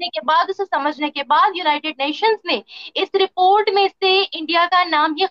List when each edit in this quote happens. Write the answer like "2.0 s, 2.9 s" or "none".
none